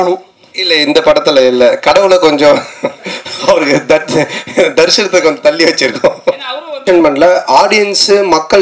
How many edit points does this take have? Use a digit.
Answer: 1